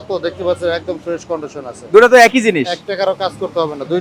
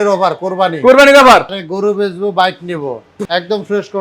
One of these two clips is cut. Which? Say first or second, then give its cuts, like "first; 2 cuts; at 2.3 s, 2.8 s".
second; 2 cuts; at 1.6 s, 3.1 s